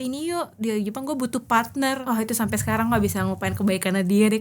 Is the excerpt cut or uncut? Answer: cut